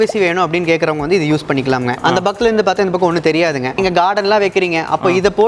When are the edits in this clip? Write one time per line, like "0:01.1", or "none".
0:02.0
0:03.8